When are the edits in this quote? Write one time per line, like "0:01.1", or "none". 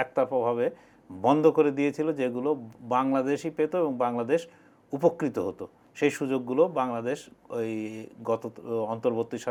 none

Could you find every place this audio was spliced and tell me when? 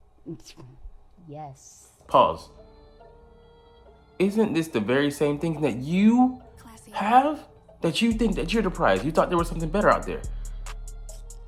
none

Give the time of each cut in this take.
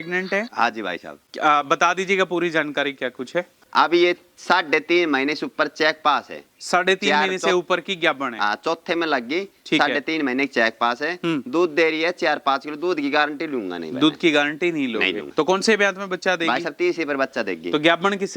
0:03.6
0:15.2

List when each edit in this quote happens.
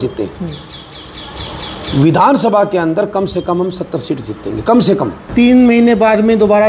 0:05.2

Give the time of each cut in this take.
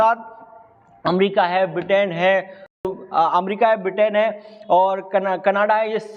0:02.8

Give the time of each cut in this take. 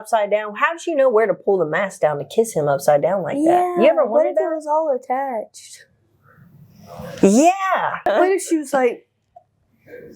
0:08.0

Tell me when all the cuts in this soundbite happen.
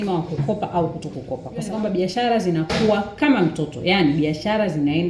0:01.7

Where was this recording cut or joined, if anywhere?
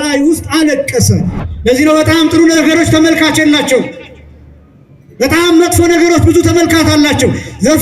0:01.4

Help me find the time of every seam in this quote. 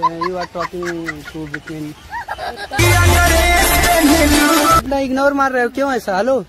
0:02.8
0:04.8

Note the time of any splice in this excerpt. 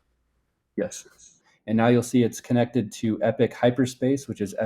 0:01.4

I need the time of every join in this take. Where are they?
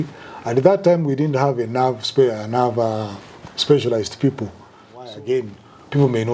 0:05.1

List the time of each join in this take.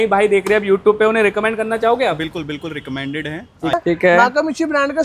0:03.7

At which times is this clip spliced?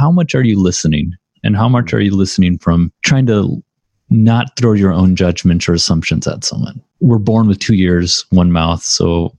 0:03.0
0:06.8

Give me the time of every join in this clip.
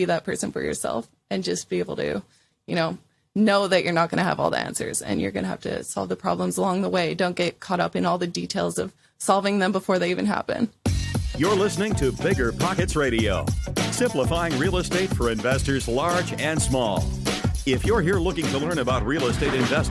0:10.8

